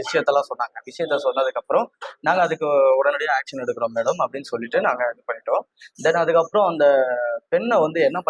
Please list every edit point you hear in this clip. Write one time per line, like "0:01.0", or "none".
none